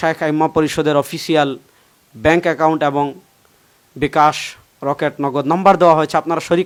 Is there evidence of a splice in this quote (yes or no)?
no